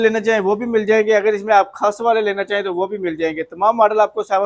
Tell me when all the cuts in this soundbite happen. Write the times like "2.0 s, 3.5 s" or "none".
none